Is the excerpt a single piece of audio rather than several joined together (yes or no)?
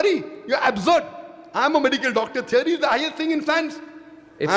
yes